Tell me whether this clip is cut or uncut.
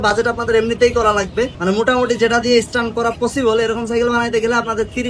cut